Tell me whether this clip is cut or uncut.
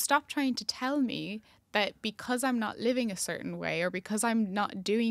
uncut